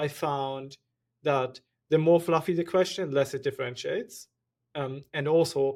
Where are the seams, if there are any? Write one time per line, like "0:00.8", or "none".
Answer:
none